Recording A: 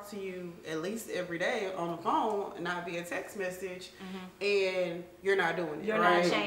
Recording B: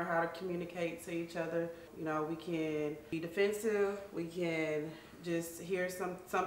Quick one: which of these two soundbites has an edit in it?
B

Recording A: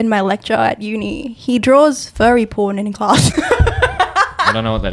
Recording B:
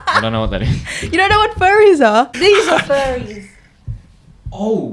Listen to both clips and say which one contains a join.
B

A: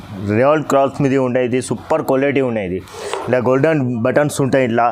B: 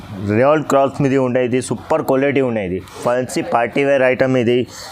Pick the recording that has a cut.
B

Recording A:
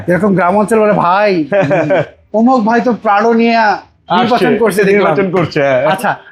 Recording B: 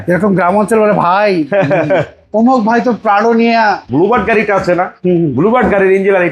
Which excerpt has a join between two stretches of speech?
B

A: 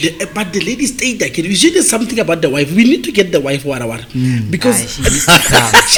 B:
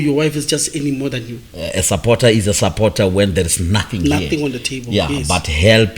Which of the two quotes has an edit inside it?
B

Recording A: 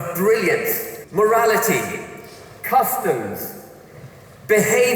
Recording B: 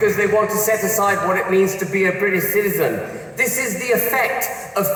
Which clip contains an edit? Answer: A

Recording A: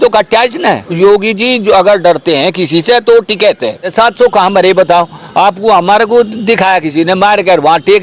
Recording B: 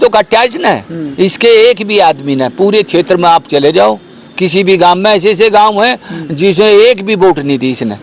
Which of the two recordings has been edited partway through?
A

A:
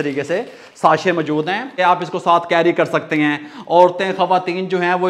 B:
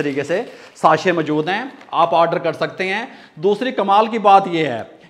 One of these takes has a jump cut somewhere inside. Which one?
A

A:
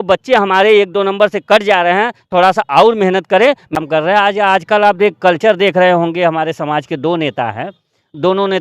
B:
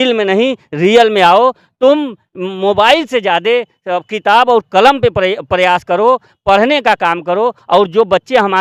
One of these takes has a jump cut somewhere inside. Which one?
A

